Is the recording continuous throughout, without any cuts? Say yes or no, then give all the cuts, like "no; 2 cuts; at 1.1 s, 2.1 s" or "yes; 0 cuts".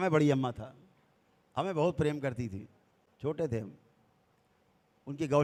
yes; 0 cuts